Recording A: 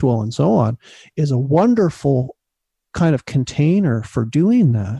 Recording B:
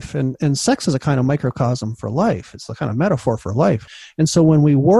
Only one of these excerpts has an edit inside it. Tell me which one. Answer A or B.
B